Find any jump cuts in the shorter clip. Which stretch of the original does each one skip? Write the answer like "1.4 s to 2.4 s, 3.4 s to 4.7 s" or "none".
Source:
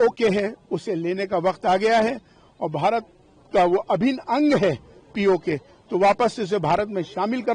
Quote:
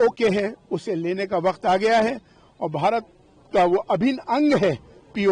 none

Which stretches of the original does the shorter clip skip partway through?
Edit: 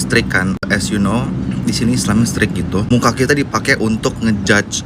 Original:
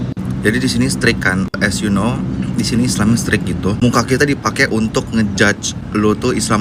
none

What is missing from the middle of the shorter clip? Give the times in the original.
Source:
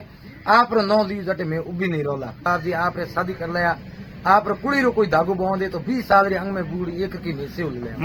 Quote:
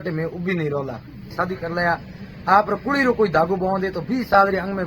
2.5 s to 2.9 s

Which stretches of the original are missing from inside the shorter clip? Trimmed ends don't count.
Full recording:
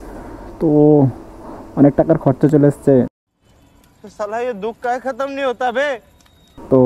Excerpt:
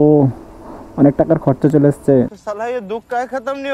3.2 s to 4.1 s

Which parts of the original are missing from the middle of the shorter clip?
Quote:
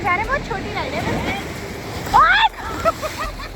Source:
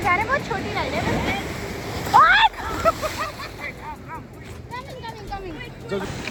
none

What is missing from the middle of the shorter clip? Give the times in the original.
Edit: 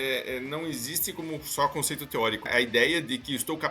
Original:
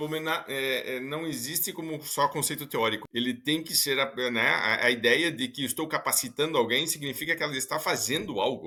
3.1 s to 4.8 s

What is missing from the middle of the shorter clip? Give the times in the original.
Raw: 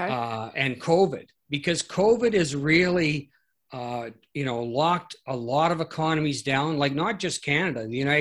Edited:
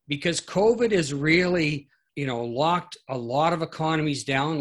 3.4 s to 4.2 s

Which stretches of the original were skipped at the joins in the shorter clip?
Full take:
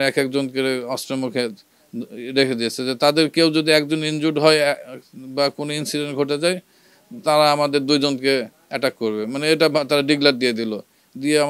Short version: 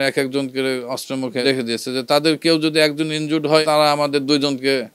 1.4 s to 2.4 s, 4.6 s to 7.2 s

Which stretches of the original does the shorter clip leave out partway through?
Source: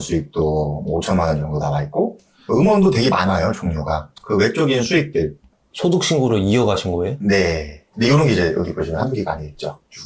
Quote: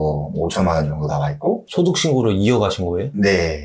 2.2 s to 5.7 s

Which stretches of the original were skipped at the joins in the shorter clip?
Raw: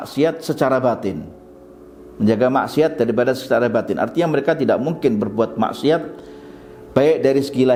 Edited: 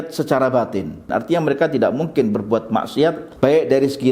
1.4 s to 3.9 s, 6.1 s to 6.8 s

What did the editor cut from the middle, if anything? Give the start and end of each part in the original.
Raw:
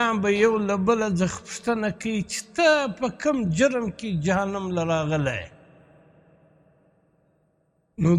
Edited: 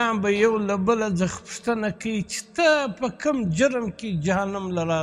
none

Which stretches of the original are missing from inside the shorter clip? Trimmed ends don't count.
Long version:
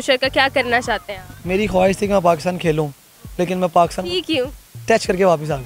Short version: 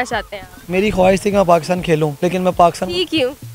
2.9 s to 3.3 s

